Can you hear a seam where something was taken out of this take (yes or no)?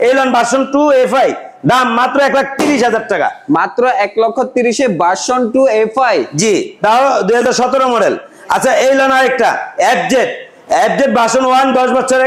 no